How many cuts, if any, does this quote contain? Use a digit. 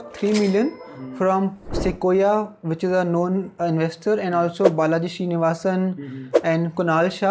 0